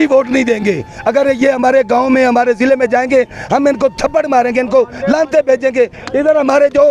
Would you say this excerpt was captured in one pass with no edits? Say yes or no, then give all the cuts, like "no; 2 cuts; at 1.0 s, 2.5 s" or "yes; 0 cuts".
yes; 0 cuts